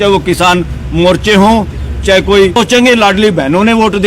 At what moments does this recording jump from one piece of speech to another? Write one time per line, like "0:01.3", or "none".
0:02.6